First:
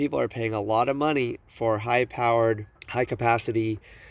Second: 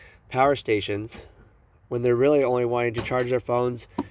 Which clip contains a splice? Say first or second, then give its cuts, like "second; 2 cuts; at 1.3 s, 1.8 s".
first; 1 cut; at 2.8 s